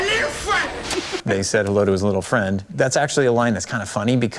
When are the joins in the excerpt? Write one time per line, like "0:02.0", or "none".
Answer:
0:00.9